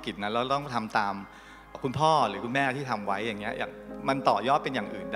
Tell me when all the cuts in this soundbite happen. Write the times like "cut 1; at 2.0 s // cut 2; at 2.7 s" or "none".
cut 1; at 1.8 s // cut 2; at 3.9 s